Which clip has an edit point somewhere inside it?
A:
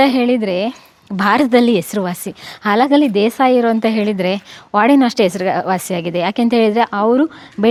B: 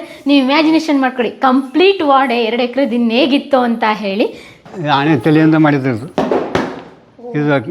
B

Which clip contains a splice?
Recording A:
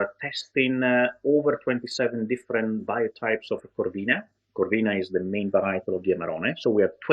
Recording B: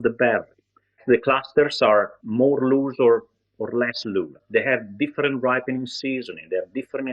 B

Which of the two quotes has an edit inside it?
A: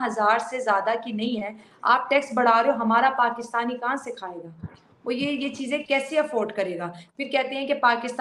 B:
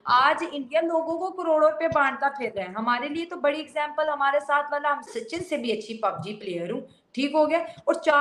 B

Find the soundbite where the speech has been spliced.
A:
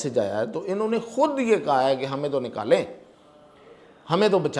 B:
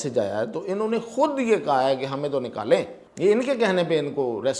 B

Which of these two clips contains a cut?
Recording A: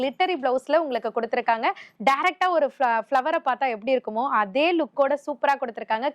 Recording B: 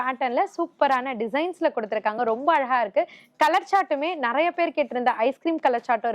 A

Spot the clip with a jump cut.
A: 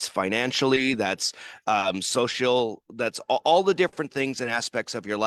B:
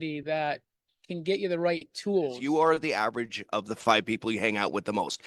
B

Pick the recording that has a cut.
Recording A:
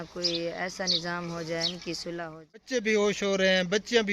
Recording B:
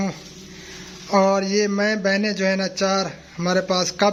A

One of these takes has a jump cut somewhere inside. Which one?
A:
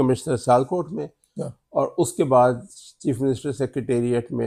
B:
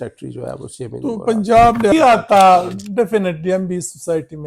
B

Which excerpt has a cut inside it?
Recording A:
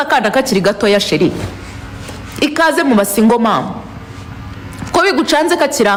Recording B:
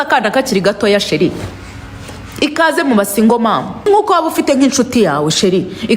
B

